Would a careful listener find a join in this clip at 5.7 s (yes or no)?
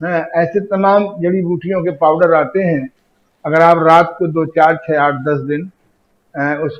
no